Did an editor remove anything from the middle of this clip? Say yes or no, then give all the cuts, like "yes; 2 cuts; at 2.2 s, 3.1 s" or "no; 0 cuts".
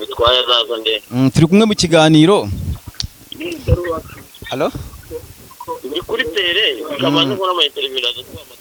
no; 0 cuts